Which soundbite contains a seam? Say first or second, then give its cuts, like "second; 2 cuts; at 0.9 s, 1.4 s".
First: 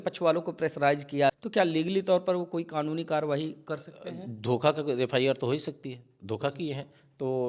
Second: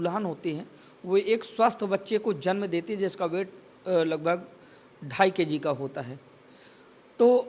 first; 1 cut; at 1.4 s